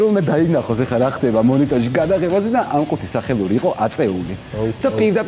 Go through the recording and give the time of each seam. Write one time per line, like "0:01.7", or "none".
none